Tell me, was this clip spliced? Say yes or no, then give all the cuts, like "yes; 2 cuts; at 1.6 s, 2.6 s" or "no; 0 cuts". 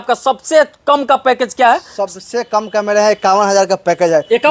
no; 0 cuts